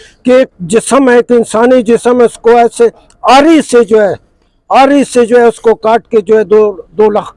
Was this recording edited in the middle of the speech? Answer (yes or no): no